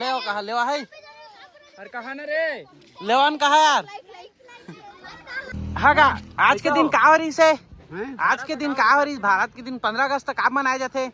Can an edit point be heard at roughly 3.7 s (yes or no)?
no